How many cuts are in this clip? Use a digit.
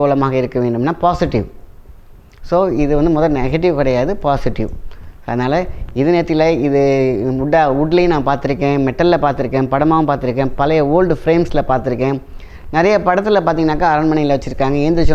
0